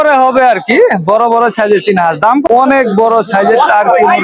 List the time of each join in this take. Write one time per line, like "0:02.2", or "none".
0:02.5